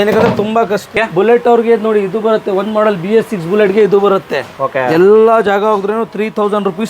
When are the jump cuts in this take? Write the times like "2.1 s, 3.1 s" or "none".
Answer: 0.9 s

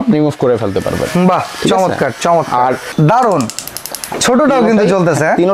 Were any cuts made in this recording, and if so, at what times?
2.9 s

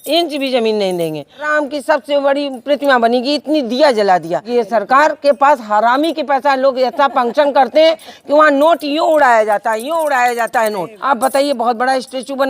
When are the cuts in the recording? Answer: 1.5 s, 4.5 s, 10.9 s

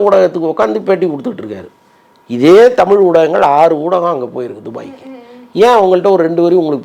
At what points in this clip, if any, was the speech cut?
none

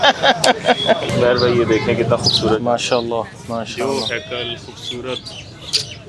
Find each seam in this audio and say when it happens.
1.1 s

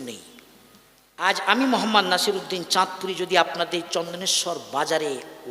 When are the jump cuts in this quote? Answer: 1.2 s

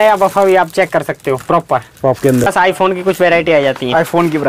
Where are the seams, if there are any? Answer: 2.5 s

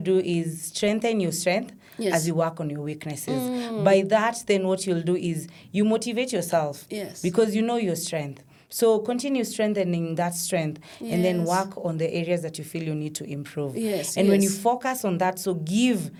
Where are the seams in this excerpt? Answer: none

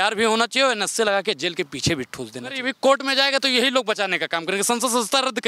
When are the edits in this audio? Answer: 2.7 s

